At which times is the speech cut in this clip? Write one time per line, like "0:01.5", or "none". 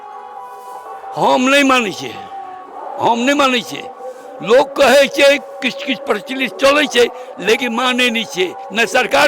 none